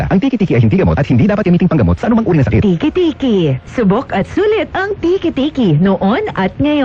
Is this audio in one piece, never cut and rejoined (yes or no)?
yes